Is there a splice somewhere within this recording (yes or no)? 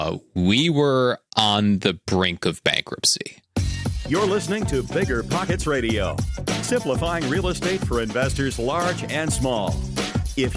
yes